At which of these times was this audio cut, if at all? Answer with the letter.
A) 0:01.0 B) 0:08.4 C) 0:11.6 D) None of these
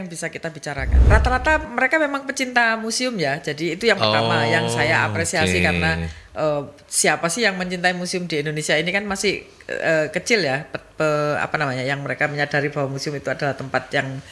A